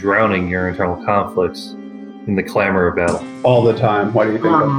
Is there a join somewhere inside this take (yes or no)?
yes